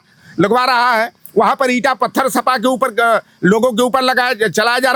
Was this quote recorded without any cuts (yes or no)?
yes